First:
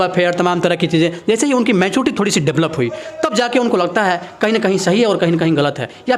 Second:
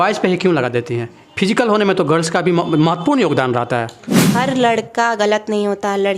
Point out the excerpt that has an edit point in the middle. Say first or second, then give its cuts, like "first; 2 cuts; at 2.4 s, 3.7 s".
second; 1 cut; at 4.2 s